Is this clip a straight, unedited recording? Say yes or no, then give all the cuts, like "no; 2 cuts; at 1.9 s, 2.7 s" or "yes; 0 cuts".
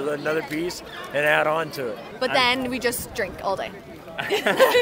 no; 1 cut; at 2.1 s